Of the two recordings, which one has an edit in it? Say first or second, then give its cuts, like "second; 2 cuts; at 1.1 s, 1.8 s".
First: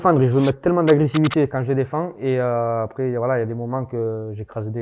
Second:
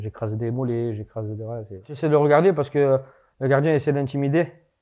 second; 1 cut; at 1.9 s